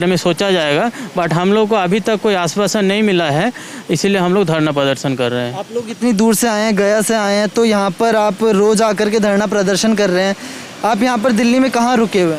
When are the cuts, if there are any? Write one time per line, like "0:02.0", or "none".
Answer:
none